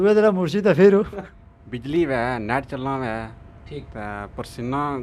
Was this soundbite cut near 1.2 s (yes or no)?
yes